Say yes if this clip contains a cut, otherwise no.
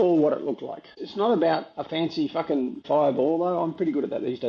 yes